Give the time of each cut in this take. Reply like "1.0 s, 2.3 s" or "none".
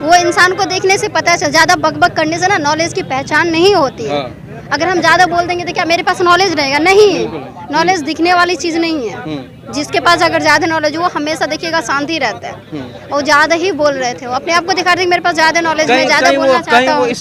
none